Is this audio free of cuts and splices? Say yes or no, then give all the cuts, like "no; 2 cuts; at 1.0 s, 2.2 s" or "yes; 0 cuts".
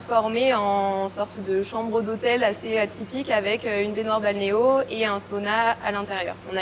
yes; 0 cuts